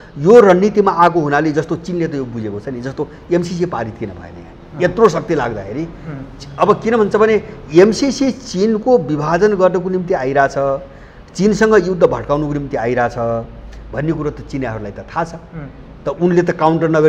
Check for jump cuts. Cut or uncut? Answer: uncut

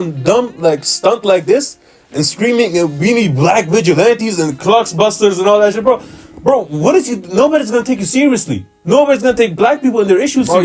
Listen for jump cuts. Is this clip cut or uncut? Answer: uncut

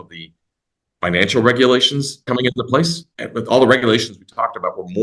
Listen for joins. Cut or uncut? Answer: cut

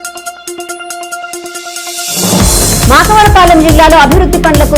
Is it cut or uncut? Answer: cut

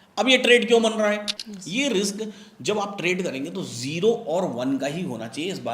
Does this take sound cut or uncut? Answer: cut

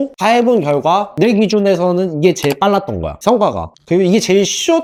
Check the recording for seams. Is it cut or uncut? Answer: uncut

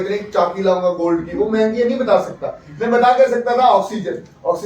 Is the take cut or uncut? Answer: uncut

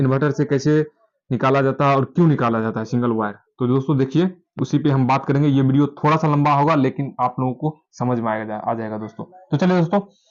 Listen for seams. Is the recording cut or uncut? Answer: uncut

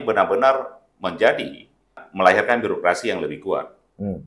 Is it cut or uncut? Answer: cut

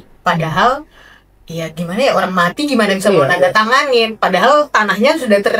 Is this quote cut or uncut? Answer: uncut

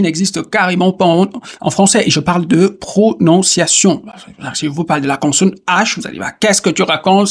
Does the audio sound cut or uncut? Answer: uncut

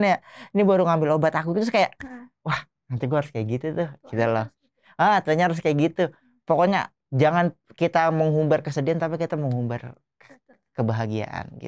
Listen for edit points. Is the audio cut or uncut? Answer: uncut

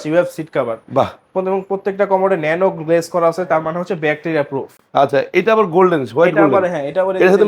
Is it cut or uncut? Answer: uncut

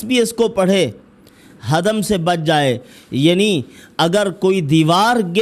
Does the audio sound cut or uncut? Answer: uncut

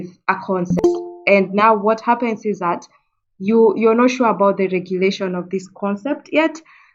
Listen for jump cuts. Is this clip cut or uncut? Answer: uncut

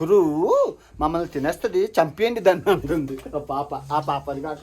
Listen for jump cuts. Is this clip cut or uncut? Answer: uncut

